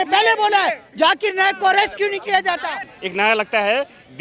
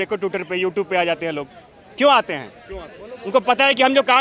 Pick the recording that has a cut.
first; 1 cut; at 2.8 s

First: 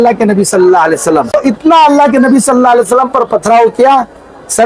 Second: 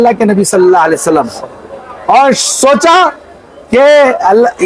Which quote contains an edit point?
first; 1 cut; at 1.3 s

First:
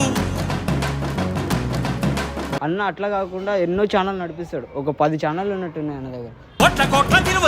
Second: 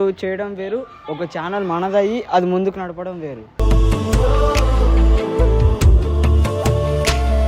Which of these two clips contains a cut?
first; 1 cut; at 2.6 s

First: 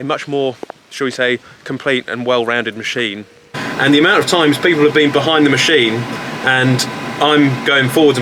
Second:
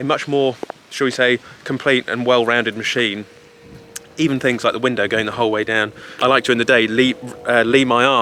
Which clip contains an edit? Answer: first; 1 cut; at 3.6 s

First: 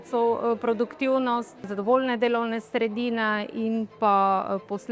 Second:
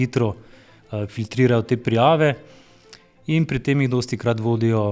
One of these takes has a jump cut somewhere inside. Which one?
first; 1 cut; at 1.7 s

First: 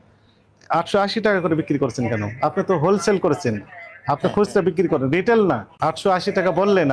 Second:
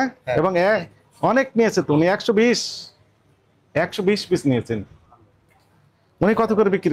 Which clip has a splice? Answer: first; 1 cut; at 5.7 s

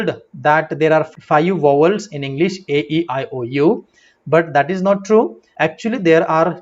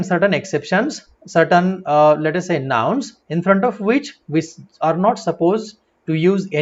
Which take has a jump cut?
first; 1 cut; at 5.4 s

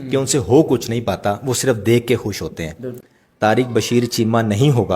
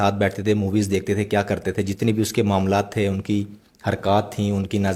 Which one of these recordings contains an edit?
first; 1 cut; at 3.0 s

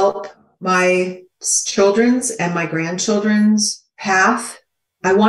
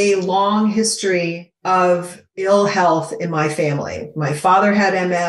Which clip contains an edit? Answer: second; 2 cuts; at 1.5 s, 2.5 s

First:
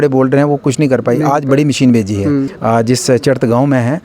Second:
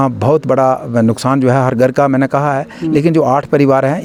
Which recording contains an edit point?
first; 1 cut; at 2.5 s

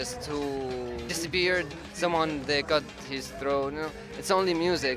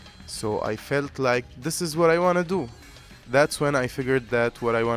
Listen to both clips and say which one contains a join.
first; 2 cuts; at 1.1 s, 1.8 s

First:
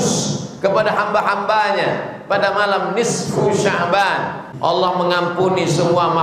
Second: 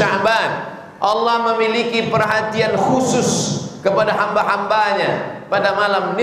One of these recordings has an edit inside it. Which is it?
first; 1 cut; at 4.4 s

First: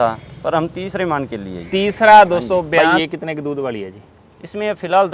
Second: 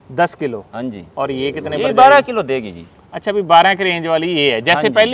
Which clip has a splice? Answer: first; 1 cut; at 2.8 s

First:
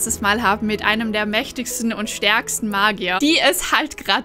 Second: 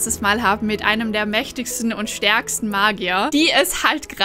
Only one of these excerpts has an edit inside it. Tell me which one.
first; 1 cut; at 3.2 s

